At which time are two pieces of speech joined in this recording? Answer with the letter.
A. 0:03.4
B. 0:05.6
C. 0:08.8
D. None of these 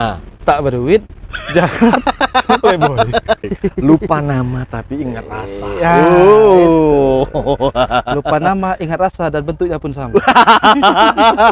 A